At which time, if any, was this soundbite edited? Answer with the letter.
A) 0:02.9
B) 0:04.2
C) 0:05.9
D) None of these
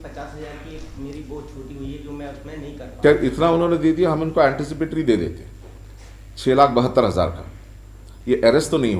A